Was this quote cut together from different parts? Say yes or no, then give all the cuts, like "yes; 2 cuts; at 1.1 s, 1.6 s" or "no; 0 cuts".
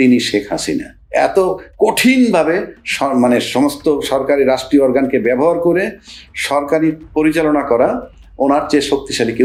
no; 0 cuts